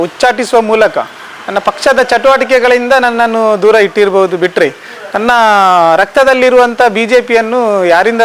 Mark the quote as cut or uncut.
uncut